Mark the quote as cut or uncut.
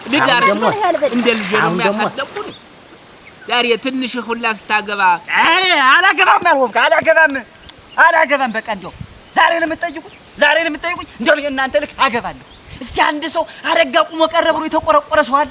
uncut